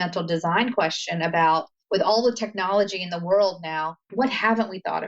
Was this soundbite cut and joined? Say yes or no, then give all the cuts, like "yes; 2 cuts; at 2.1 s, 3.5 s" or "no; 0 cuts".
yes; 2 cuts; at 1.8 s, 4.0 s